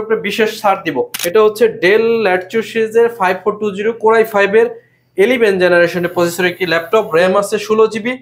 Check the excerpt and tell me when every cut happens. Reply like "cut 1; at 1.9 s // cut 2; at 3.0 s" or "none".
cut 1; at 1.2 s